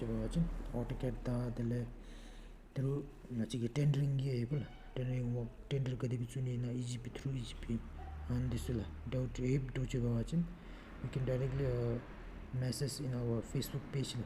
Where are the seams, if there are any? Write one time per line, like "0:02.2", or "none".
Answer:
none